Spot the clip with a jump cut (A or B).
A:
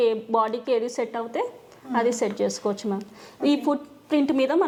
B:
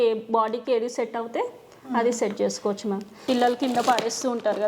B